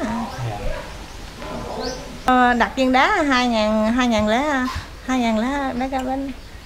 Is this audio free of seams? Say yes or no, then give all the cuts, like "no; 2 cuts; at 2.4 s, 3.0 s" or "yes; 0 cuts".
no; 1 cut; at 2.3 s